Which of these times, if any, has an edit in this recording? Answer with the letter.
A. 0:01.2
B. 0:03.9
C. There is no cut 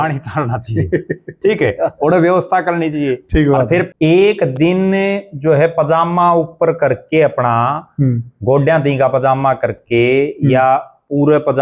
B